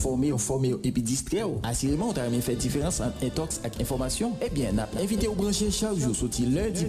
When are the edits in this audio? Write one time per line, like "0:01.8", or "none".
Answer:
0:01.7